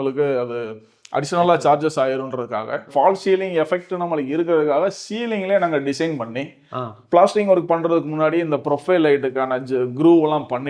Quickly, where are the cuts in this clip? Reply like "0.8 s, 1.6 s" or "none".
2.9 s